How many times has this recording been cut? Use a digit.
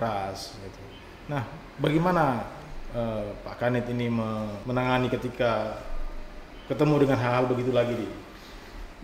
1